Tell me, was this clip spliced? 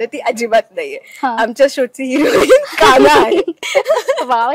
yes; 1 cut; at 3.6 s

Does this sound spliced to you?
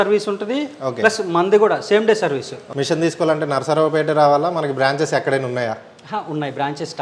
yes; 1 cut; at 2.6 s

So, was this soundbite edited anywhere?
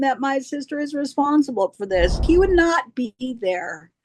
yes; 1 cut; at 2.2 s

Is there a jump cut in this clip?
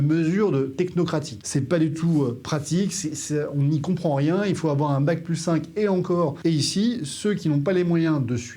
yes; 2 cuts; at 1.4 s, 6.4 s

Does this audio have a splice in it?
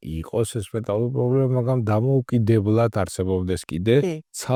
no; 0 cuts

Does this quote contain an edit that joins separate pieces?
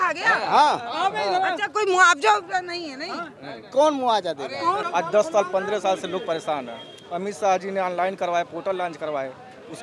yes; 1 cut; at 4.9 s

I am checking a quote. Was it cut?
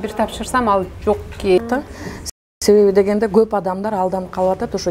yes; 1 cut; at 1.9 s

